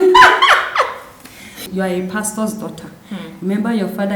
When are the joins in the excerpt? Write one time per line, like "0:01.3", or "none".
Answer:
0:01.5